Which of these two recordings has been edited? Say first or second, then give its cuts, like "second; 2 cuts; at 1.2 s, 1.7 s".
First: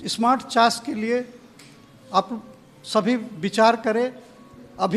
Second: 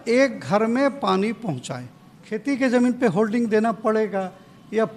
second; 1 cut; at 2.0 s